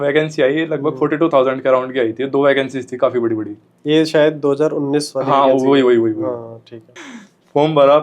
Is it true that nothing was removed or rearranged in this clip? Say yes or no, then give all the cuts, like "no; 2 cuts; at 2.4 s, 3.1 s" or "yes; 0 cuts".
no; 1 cut; at 6.8 s